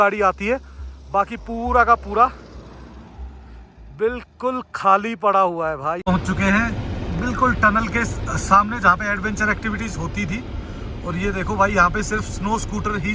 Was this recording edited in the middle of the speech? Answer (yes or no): yes